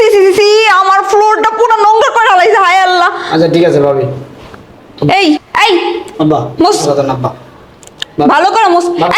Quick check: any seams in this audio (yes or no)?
yes